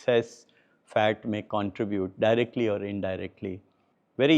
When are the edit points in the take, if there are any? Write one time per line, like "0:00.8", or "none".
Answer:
none